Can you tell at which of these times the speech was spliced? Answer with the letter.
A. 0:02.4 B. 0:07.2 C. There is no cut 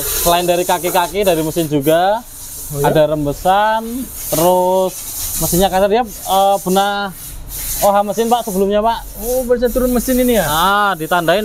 C